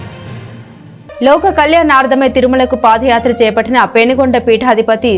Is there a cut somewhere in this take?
yes; 1 cut; at 1.2 s

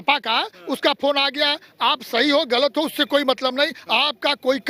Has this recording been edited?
no; 0 cuts

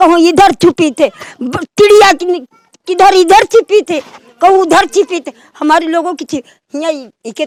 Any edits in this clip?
no; 0 cuts

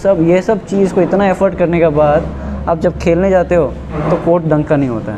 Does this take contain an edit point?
no; 0 cuts

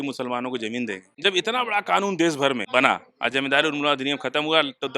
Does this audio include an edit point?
yes; 2 cuts; at 1.1 s, 2.6 s

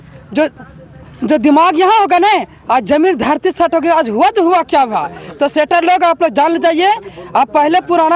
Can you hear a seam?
no; 0 cuts

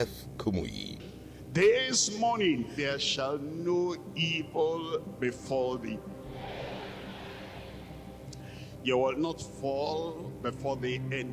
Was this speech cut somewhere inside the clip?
yes; 1 cut; at 1.0 s

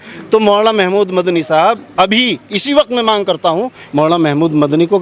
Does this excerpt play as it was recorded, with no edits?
no; 1 cut; at 3.8 s

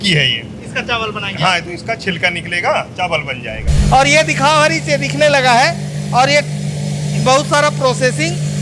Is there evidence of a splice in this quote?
yes; 1 cut; at 3.7 s

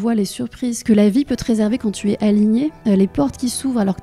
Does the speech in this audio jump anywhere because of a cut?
yes; 2 cuts; at 0.8 s, 2.8 s

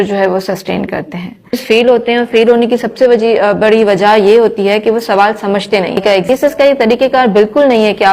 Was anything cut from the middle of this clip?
yes; 2 cuts; at 1.6 s, 6.3 s

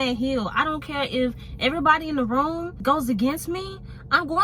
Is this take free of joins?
yes; 0 cuts

